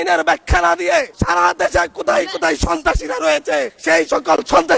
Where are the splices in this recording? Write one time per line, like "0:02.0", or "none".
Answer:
0:01.1
0:03.8